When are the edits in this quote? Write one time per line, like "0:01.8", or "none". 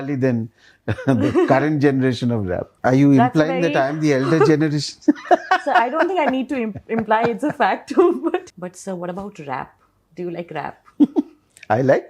0:02.7
0:08.5